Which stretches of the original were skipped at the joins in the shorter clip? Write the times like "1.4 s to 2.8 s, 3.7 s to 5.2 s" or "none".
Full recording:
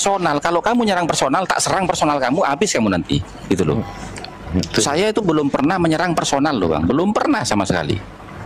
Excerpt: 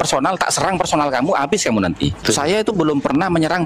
3.3 s to 4.7 s